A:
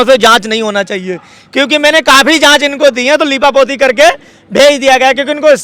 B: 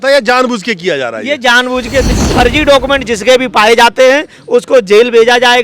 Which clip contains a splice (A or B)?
B